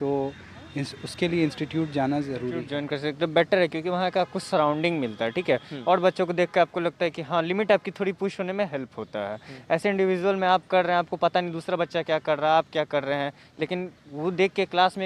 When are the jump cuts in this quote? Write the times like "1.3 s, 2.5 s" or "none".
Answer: 2.7 s